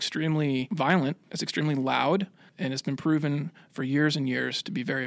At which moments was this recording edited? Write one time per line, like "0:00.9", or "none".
0:01.0
0:02.4